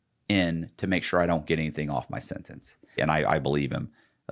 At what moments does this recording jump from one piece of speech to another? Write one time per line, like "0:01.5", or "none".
0:03.0